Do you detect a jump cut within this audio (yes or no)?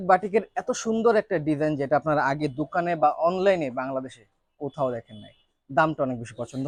no